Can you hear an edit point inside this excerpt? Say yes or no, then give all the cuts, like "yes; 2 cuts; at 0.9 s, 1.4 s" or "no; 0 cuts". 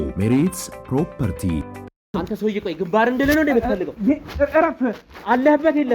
yes; 1 cut; at 2.1 s